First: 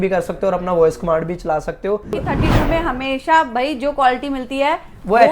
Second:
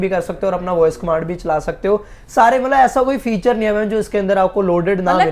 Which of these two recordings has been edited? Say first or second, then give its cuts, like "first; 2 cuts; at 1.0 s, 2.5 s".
first; 1 cut; at 2.2 s